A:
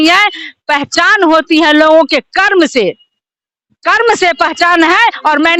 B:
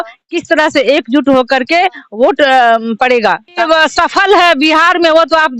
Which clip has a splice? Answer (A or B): B